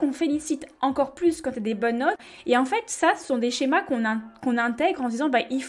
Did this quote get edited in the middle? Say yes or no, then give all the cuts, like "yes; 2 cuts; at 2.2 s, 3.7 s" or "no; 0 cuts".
yes; 1 cut; at 2.2 s